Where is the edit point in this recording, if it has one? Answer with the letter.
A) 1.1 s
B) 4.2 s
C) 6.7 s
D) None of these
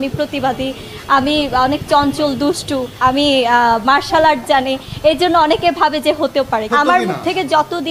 C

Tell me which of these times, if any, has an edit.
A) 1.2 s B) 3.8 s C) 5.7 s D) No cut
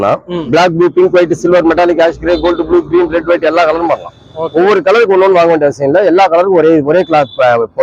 D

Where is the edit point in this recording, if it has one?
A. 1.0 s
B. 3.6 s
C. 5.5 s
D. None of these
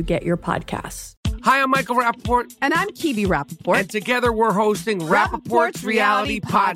A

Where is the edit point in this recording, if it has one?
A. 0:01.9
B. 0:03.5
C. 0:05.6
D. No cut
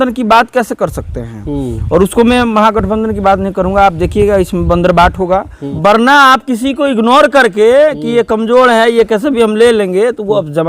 C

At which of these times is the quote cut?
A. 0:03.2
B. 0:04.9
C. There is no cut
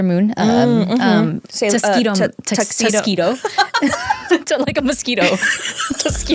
C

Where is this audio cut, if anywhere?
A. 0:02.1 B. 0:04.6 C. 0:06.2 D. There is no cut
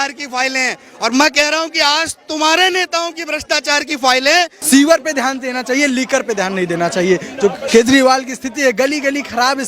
B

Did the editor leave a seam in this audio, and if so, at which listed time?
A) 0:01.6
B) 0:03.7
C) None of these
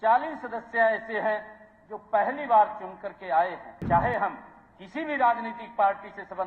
B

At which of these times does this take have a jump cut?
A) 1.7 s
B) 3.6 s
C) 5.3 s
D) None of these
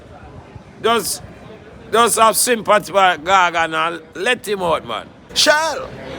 C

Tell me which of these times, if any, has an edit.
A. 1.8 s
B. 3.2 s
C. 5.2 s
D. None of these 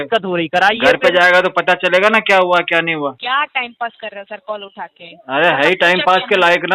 B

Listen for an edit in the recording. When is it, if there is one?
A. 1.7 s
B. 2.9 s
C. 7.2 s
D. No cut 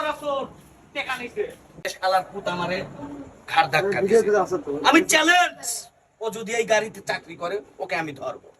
A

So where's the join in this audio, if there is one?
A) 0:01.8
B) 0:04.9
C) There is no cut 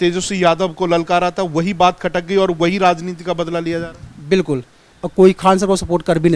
B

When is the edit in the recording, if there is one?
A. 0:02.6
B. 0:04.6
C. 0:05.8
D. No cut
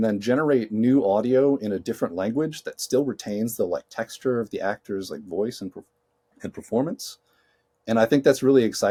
D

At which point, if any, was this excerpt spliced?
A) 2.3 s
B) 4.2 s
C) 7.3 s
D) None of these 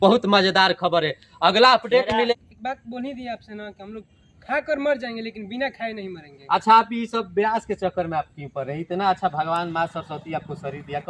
A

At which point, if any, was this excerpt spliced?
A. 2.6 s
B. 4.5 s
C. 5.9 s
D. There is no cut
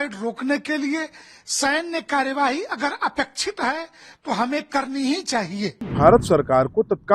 C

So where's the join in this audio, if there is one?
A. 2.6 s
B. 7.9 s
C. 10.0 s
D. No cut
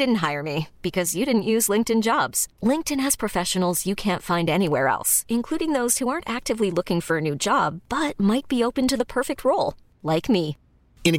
D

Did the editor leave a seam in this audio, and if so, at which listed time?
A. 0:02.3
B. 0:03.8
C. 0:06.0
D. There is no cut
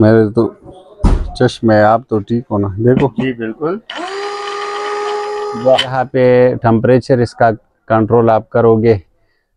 C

